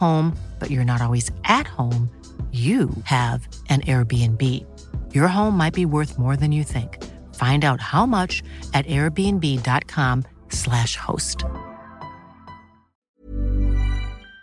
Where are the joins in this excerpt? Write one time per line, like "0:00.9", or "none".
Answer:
0:13.2